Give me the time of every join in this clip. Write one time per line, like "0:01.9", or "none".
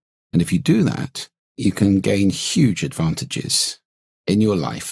0:01.5